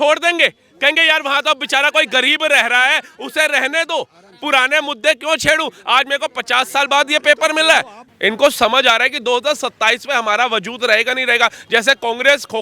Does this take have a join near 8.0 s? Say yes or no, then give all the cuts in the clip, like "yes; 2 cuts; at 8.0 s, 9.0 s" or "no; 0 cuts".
yes; 1 cut; at 8.0 s